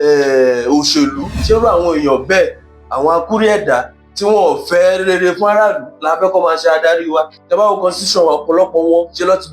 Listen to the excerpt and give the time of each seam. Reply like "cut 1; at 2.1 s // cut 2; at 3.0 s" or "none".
cut 1; at 1.3 s // cut 2; at 7.4 s